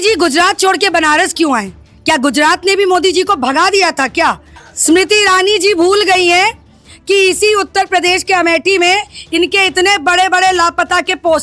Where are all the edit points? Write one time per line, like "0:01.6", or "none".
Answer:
0:04.5